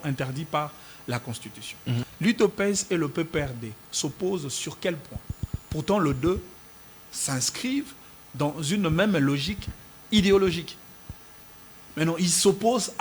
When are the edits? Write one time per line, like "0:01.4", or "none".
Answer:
0:02.1